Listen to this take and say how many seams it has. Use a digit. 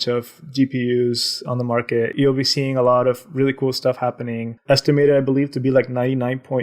1